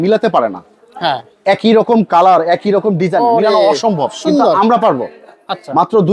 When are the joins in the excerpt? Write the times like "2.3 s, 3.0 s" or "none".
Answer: none

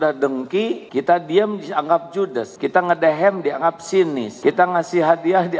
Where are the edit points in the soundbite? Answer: 0.8 s, 2.5 s, 4.3 s

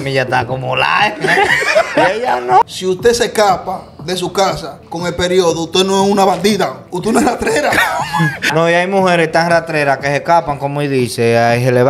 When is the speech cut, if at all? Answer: 2.6 s, 8.5 s

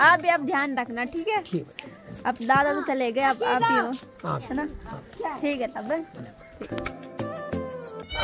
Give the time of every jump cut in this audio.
none

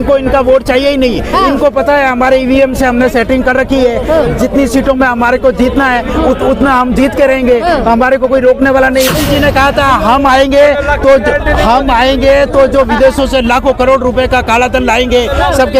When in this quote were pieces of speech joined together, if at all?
9.2 s

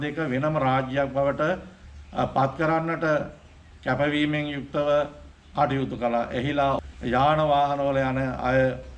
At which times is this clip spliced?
6.8 s

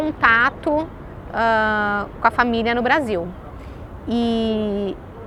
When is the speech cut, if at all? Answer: none

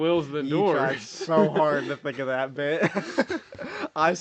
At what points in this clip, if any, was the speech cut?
none

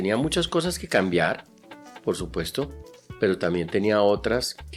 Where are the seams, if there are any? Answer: none

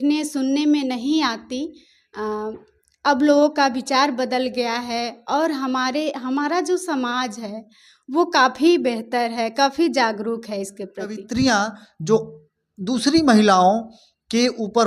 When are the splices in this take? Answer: 11.2 s

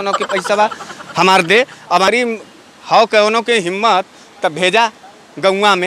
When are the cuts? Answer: 2.1 s

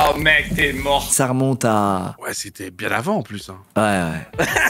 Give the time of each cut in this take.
1.1 s, 2.2 s

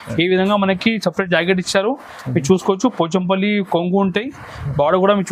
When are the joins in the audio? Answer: none

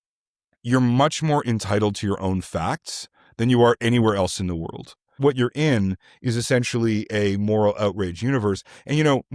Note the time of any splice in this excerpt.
5.2 s

